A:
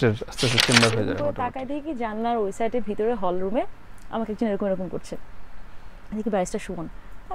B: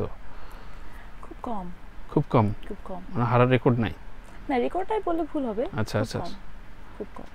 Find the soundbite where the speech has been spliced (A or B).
A